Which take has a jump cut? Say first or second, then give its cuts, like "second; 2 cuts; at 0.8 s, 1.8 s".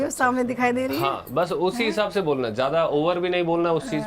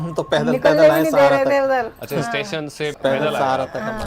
second; 1 cut; at 2.9 s